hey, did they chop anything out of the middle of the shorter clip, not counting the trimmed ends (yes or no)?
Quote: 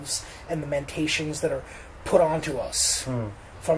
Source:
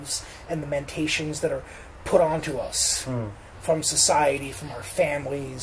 no